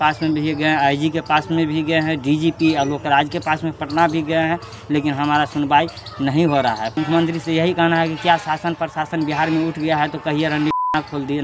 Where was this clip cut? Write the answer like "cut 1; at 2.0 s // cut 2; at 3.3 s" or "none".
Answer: cut 1; at 6.9 s